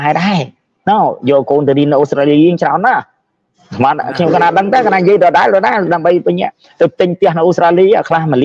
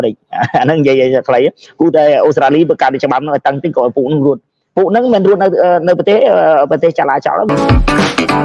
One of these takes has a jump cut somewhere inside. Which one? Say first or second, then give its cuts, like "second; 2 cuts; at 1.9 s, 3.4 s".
second; 1 cut; at 7.5 s